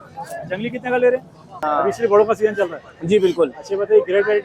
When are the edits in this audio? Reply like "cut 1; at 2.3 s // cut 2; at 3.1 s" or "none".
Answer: cut 1; at 1.6 s